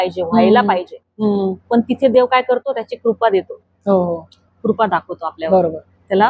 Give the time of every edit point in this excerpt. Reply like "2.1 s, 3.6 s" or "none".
none